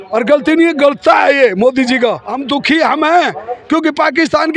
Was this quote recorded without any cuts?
no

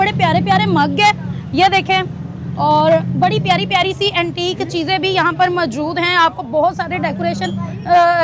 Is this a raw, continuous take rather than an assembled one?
yes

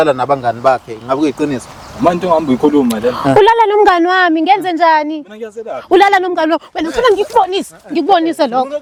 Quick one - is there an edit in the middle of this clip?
no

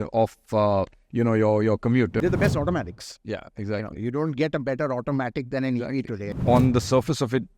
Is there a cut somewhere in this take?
yes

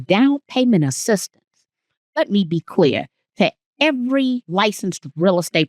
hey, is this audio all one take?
no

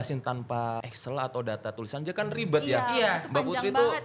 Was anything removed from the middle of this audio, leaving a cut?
yes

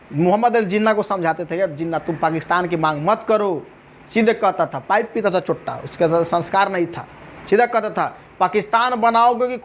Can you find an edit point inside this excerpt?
no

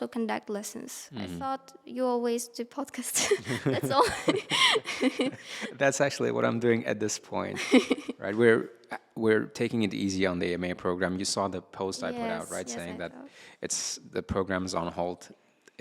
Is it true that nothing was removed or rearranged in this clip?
yes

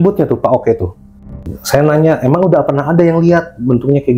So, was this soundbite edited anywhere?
yes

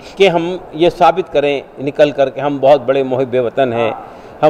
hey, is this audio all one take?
yes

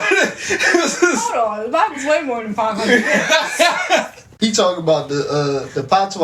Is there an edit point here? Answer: yes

